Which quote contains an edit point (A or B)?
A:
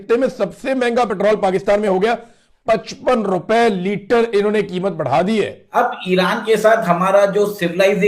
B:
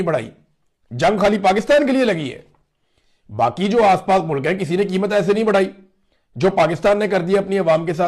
A